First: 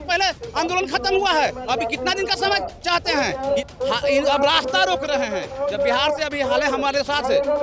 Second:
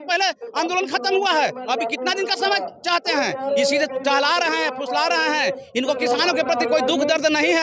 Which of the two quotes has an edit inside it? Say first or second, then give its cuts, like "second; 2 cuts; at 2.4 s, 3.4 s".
first; 1 cut; at 3.6 s